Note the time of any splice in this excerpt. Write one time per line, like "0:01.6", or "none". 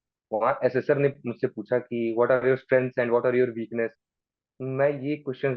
none

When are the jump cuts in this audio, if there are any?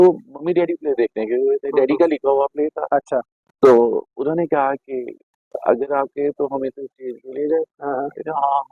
none

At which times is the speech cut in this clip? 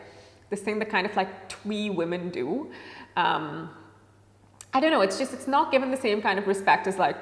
none

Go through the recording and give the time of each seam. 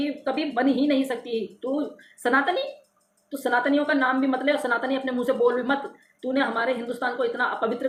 none

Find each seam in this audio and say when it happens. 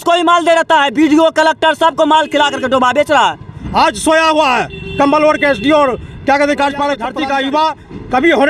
0:03.6
0:07.0

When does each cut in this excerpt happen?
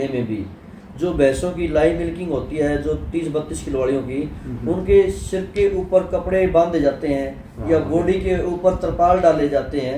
none

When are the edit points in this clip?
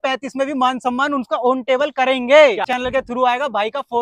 0:02.7

